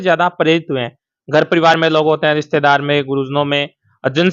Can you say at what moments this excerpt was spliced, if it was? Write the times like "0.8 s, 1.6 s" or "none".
none